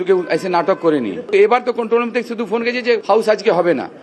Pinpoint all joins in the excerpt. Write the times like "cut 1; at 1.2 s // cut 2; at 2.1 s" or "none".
cut 1; at 3.0 s